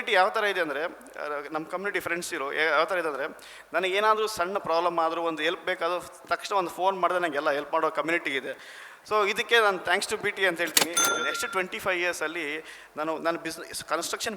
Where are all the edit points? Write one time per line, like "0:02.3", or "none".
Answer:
0:11.0